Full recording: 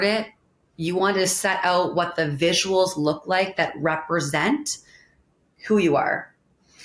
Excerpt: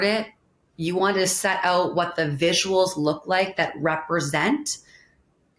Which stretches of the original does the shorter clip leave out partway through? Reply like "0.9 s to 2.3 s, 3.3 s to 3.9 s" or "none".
none